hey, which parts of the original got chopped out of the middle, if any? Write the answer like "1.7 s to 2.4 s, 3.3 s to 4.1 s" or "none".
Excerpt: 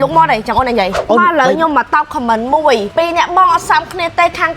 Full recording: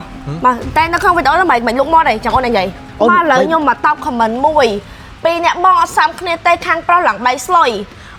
2.7 s to 2.9 s, 4.8 s to 5.1 s